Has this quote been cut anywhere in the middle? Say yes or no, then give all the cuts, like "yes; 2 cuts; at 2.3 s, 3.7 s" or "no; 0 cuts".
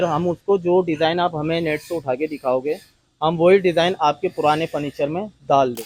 no; 0 cuts